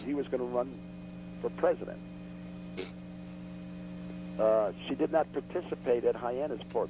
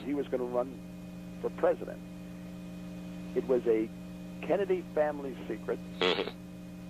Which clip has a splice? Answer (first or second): second